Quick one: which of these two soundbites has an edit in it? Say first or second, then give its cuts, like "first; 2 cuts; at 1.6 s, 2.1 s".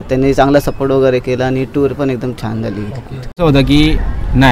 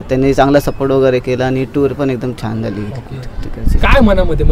first; 1 cut; at 3.4 s